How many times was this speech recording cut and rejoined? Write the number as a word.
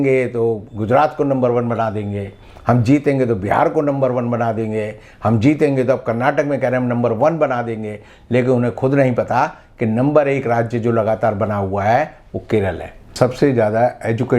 one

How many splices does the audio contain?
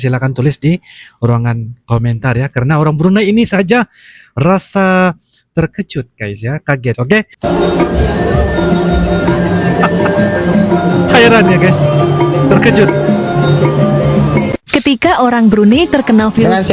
zero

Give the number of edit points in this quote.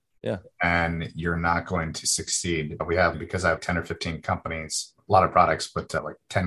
two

